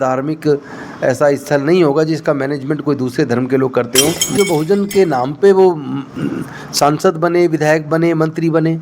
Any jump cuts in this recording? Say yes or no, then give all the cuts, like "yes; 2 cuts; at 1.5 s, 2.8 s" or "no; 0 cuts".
yes; 1 cut; at 4.4 s